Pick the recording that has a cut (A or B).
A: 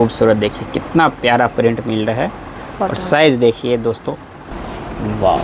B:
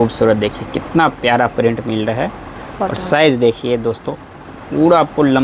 A